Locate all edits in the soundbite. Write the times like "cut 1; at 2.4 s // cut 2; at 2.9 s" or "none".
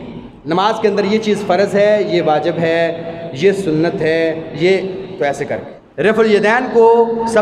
cut 1; at 5.8 s